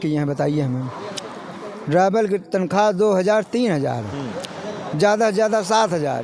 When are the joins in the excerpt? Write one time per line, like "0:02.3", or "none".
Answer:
none